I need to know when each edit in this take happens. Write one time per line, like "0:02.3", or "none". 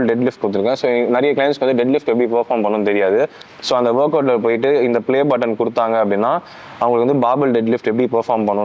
none